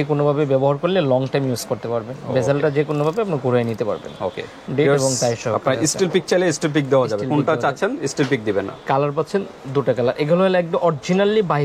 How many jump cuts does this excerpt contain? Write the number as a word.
zero